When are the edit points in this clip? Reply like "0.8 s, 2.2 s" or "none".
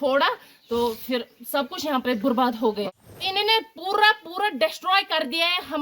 2.8 s